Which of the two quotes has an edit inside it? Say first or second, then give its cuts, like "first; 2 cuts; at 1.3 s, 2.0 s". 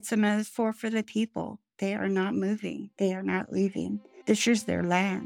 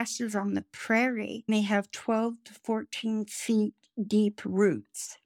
first; 2 cuts; at 2.8 s, 4.1 s